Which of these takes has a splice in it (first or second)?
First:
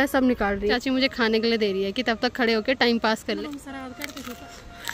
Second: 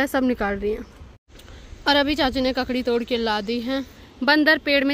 first